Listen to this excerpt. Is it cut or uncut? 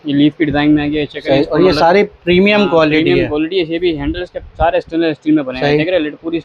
uncut